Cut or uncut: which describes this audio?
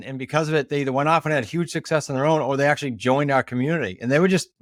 uncut